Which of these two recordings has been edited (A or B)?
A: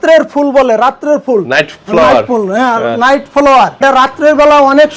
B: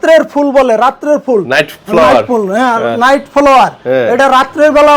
A